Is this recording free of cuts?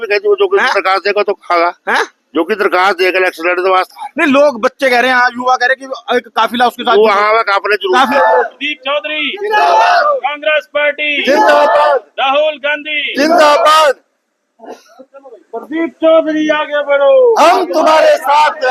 no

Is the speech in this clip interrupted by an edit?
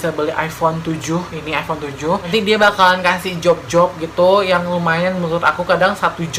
yes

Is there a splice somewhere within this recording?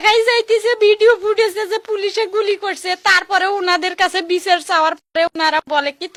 no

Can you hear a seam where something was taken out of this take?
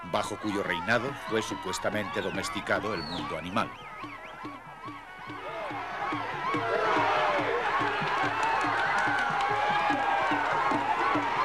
no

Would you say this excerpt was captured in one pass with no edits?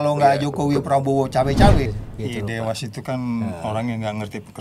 no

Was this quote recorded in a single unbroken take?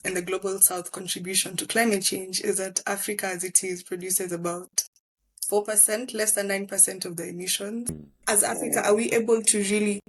no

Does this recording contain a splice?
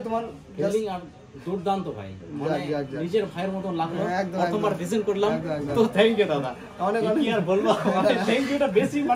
no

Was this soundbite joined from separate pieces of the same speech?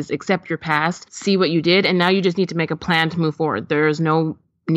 yes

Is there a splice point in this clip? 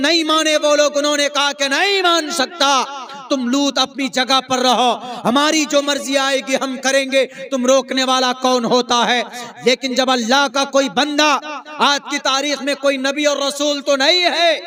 no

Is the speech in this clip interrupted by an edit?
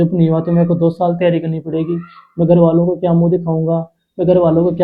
no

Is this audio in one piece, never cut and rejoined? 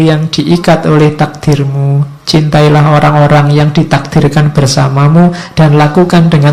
yes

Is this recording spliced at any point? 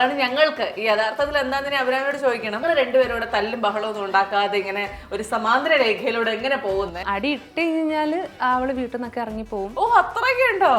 yes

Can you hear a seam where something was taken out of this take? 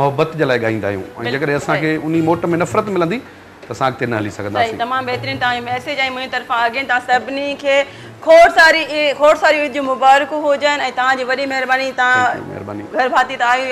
no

